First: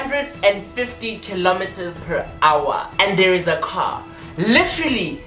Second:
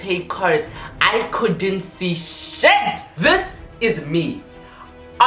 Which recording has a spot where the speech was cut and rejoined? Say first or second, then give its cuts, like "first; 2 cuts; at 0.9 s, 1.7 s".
second; 1 cut; at 3.1 s